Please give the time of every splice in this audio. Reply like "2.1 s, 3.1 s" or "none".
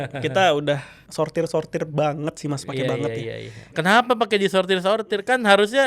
1.0 s, 3.8 s